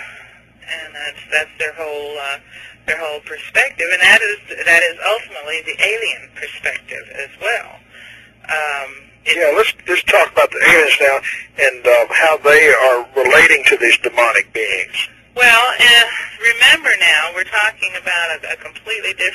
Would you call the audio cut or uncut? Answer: uncut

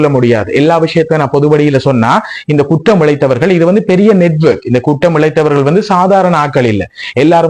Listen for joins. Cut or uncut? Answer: uncut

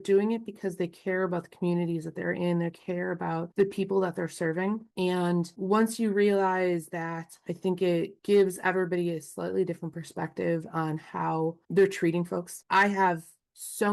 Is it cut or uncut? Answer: cut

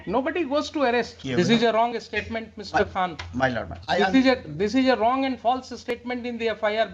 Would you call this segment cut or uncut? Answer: cut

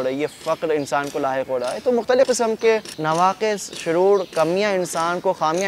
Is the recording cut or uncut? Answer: cut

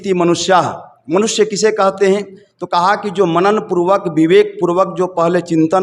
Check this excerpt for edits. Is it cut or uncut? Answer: uncut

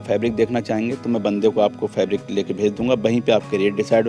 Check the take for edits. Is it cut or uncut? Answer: uncut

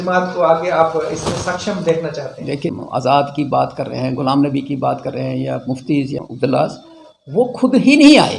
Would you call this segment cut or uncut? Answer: cut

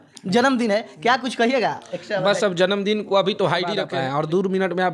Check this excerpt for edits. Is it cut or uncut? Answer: cut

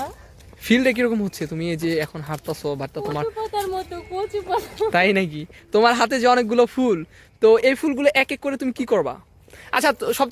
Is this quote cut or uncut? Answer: uncut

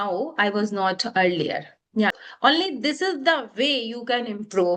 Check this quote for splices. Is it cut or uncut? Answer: cut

